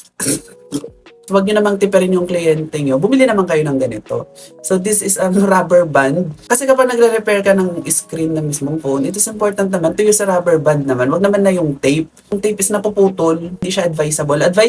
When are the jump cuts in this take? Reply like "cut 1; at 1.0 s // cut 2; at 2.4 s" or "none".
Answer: cut 1; at 1.1 s // cut 2; at 6.3 s // cut 3; at 12.4 s // cut 4; at 13.7 s